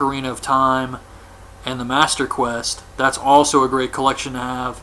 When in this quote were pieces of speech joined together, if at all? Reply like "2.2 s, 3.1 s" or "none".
none